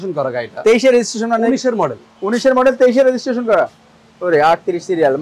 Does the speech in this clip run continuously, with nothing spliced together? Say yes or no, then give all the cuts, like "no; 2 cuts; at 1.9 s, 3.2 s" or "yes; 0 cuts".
yes; 0 cuts